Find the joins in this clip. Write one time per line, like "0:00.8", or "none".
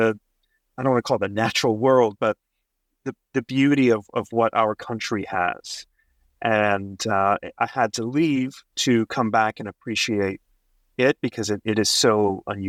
none

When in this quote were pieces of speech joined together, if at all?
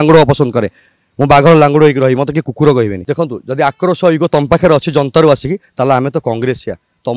0:03.0

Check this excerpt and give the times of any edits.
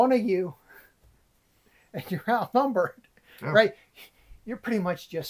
none

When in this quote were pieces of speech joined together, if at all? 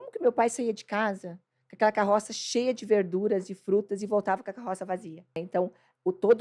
0:05.4

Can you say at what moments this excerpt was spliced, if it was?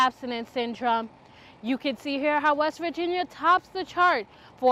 none

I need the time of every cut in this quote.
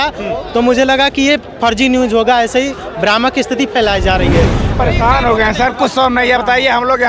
0:04.7

